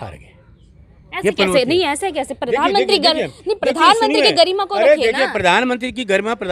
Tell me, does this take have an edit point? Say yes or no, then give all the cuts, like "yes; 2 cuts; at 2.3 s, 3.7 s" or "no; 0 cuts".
no; 0 cuts